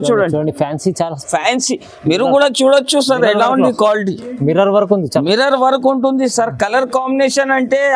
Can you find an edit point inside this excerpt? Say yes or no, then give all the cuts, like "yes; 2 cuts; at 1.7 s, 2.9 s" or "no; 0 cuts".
no; 0 cuts